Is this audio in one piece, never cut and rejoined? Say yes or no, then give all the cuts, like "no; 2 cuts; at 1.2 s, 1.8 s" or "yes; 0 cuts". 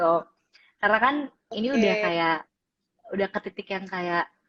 yes; 0 cuts